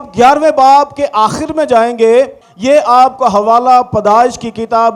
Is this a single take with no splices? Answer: no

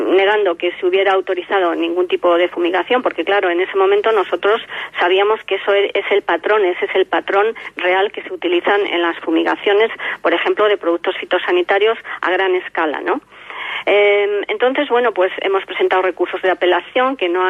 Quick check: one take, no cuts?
yes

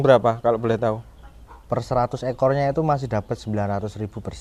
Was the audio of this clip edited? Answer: no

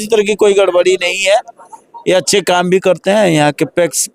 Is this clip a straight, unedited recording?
yes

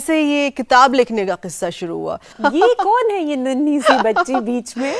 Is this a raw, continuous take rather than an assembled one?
no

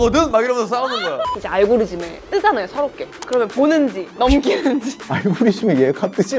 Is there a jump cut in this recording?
yes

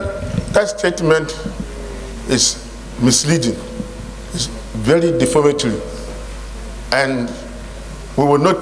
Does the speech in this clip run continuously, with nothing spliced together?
yes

